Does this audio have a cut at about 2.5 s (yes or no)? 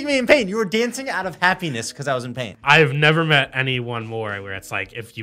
yes